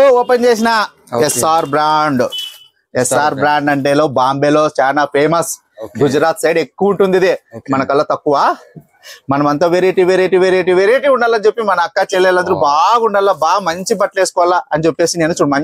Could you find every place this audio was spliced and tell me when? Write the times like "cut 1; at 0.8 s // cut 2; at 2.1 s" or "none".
none